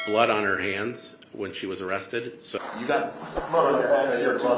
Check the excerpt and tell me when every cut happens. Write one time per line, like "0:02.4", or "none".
0:02.6